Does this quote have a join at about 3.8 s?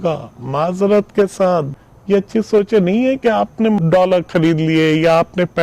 yes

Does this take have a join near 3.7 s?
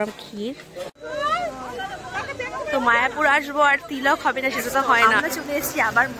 no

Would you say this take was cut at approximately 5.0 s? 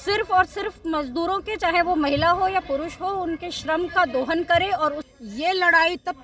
yes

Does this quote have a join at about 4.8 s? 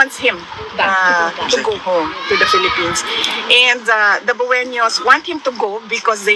no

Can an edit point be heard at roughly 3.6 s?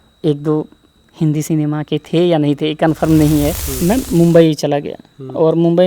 yes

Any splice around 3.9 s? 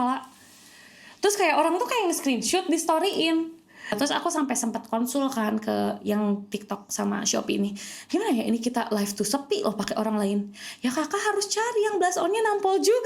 yes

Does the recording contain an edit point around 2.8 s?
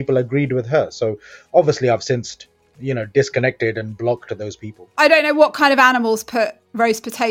no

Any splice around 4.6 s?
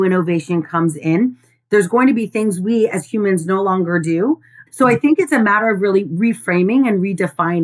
yes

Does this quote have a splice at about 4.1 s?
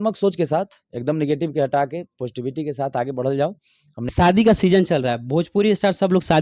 yes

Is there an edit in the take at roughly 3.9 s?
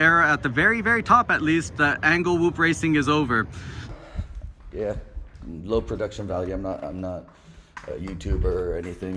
yes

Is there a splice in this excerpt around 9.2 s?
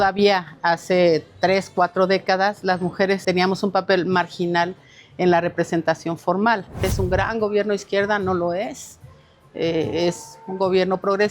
no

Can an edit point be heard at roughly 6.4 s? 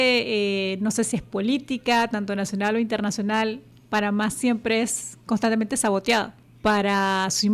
yes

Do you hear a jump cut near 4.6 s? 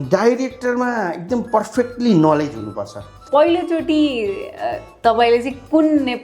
no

